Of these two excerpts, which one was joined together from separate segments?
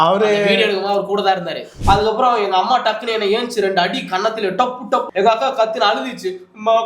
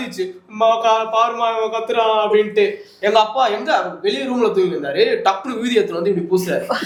first; 2 cuts; at 1.7 s, 5.1 s

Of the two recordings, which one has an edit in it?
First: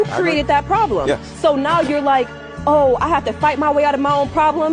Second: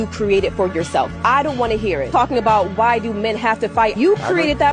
second; 1 cut; at 2.4 s

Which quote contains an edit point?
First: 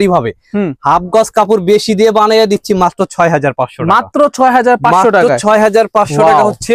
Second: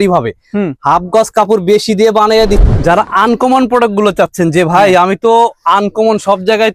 second; 1 cut; at 2.6 s

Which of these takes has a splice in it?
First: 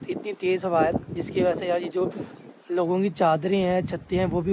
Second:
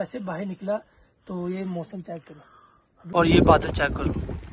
second; 1 cut; at 2.9 s

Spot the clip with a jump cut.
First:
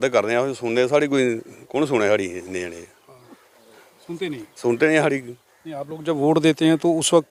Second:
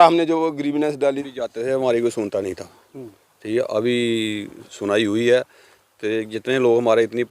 second; 1 cut; at 1.2 s

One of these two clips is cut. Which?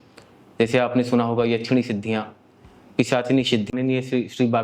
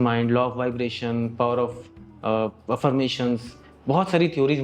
first; 1 cut; at 3.7 s

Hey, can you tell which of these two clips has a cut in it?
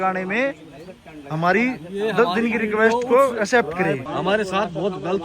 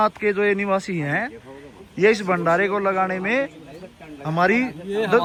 first; 1 cut; at 4.0 s

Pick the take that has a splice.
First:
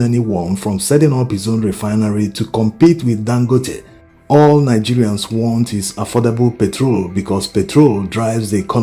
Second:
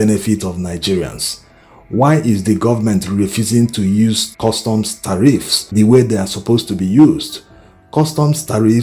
first; 1 cut; at 7.8 s

